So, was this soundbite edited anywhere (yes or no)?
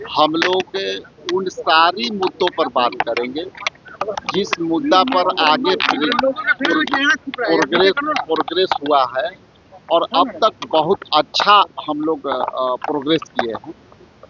no